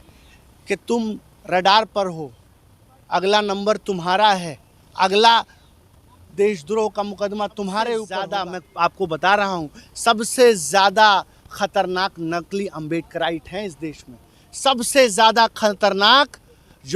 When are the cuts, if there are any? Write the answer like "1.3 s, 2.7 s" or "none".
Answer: 8.2 s